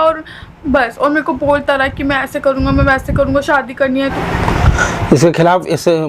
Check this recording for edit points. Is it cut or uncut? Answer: cut